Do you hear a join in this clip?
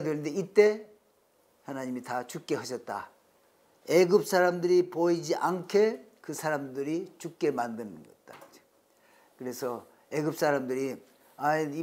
no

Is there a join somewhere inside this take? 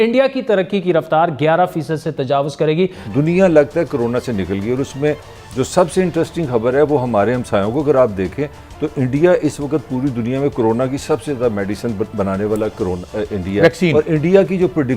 yes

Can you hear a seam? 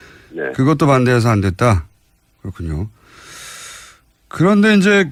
no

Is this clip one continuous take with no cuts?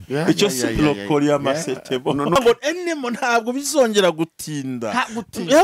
no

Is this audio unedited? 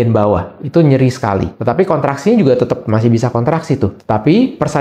no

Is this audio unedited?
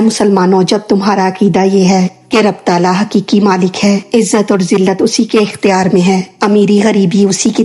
yes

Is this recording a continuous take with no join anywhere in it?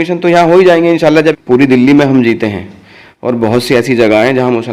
no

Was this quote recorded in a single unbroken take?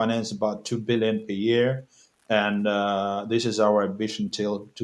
yes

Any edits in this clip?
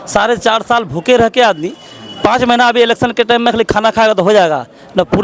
no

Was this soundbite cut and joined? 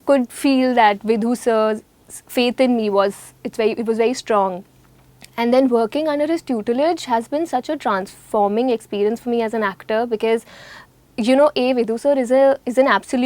no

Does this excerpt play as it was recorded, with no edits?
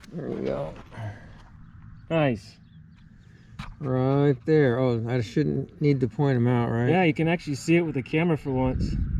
yes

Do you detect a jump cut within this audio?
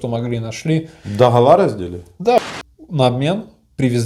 yes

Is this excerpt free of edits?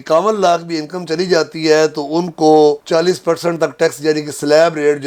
yes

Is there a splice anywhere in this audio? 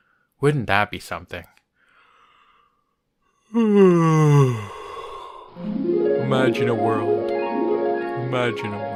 no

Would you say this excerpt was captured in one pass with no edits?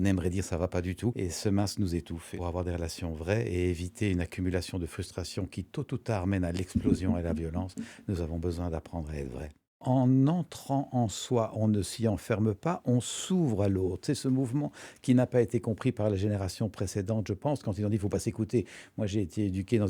no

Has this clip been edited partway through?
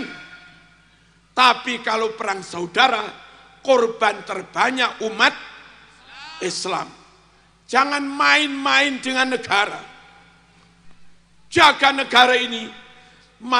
no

